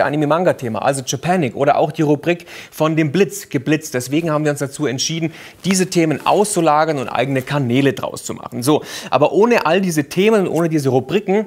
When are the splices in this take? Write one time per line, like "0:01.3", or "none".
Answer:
0:07.0